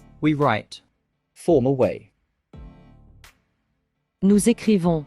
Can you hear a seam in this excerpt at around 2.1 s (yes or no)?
yes